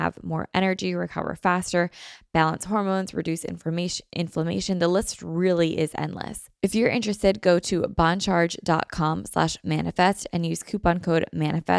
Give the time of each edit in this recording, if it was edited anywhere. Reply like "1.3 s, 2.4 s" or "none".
6.4 s

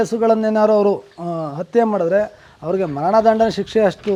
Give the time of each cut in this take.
none

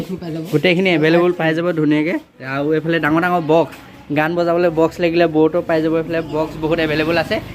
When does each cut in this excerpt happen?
none

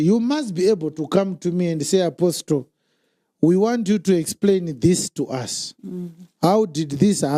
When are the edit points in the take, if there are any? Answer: none

